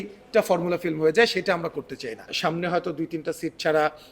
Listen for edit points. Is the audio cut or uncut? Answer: cut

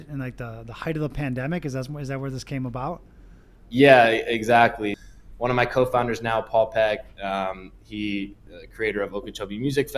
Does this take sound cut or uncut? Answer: cut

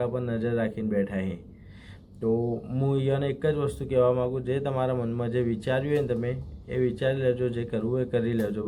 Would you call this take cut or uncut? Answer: uncut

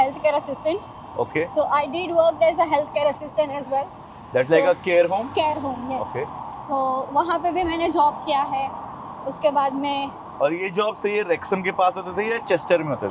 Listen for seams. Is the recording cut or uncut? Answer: uncut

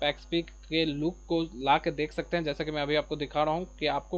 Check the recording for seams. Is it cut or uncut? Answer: uncut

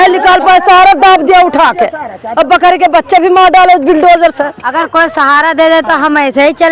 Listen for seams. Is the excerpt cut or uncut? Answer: cut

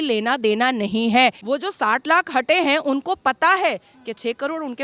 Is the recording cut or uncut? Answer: cut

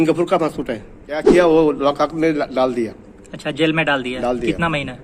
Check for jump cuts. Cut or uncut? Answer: cut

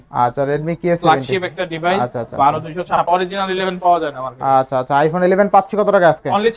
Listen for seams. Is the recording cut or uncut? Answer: cut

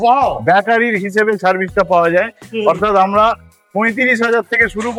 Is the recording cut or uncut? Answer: uncut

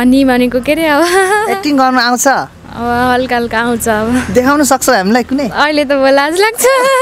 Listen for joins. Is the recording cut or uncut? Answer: uncut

